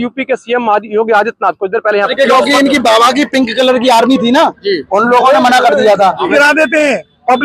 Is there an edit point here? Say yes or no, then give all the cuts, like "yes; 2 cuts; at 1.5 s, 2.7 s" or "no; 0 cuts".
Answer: yes; 2 cuts; at 2.1 s, 6.3 s